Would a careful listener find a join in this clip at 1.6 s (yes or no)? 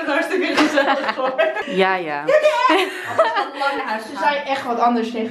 yes